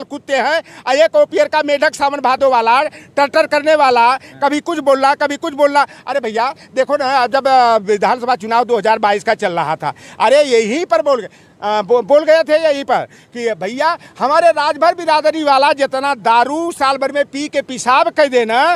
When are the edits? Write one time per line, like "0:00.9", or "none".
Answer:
none